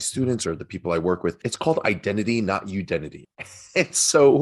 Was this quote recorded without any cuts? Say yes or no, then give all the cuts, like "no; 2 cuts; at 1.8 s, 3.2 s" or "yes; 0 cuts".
no; 2 cuts; at 1.5 s, 3.2 s